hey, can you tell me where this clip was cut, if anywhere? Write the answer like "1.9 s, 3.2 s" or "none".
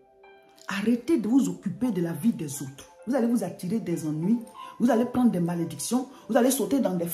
none